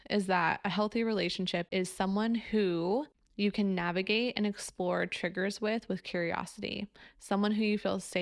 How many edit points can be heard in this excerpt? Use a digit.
2